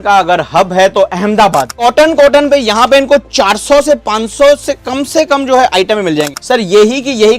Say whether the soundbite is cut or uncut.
cut